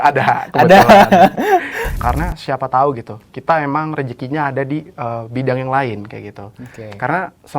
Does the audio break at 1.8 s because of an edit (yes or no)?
yes